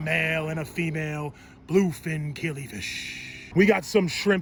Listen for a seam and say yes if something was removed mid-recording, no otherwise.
no